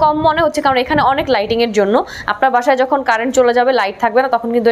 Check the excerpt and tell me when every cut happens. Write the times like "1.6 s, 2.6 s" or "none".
none